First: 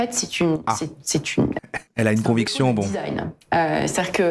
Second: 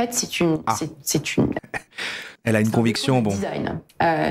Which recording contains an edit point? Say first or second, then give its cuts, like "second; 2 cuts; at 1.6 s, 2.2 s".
first; 1 cut; at 1.8 s